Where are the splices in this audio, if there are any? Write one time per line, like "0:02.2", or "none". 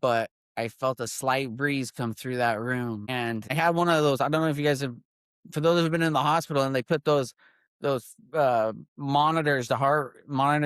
0:03.5